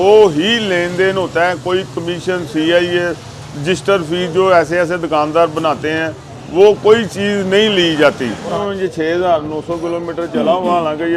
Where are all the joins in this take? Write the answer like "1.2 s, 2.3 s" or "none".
8.6 s